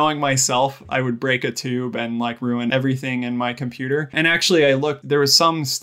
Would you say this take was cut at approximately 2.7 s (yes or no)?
yes